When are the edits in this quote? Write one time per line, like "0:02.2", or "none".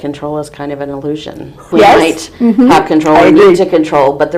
0:01.6